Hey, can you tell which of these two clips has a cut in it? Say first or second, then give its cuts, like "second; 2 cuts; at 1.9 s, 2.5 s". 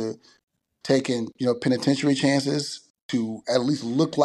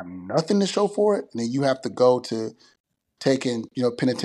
first; 1 cut; at 3.0 s